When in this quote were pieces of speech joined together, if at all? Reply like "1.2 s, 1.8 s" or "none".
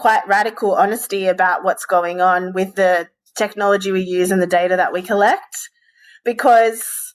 none